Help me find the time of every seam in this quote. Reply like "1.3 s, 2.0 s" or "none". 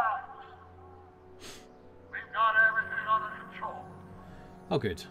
none